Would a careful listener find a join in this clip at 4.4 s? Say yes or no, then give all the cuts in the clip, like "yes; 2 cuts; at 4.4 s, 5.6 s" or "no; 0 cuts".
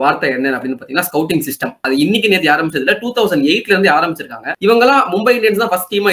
yes; 2 cuts; at 1.7 s, 4.4 s